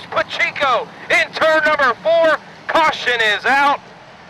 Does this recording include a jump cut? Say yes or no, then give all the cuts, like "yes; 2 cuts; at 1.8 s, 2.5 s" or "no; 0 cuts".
no; 0 cuts